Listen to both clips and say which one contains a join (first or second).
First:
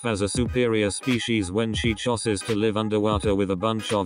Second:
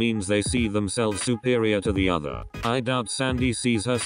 second